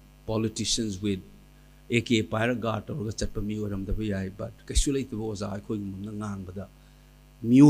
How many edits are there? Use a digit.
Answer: 0